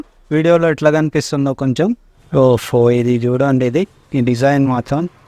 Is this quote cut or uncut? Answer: cut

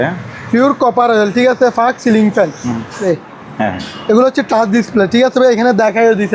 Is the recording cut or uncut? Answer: cut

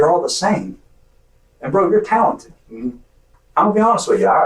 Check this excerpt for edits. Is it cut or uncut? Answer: cut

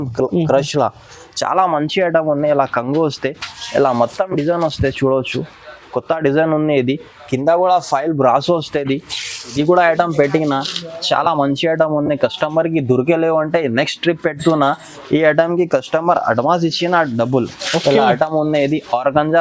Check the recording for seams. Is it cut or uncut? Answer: cut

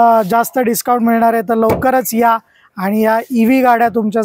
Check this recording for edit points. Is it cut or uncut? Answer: uncut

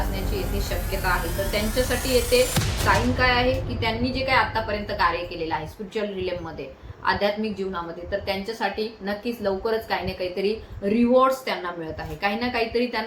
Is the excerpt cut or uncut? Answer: uncut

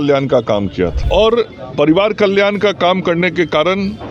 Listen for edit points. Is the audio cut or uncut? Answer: cut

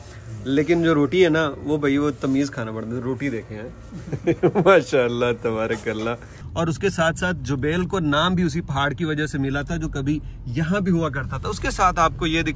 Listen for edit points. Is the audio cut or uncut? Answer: cut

